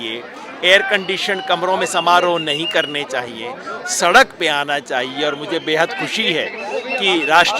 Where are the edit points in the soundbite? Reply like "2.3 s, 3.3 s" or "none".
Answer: none